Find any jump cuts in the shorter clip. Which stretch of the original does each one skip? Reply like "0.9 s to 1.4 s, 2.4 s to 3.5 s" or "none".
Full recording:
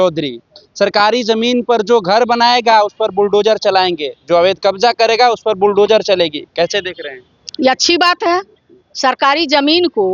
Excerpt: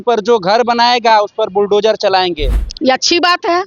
4.1 s to 7.3 s